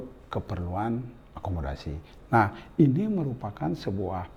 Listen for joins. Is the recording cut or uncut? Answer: cut